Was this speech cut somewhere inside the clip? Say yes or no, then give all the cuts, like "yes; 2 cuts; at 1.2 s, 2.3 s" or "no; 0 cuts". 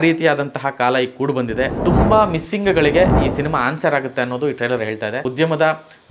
yes; 2 cuts; at 1.7 s, 5.3 s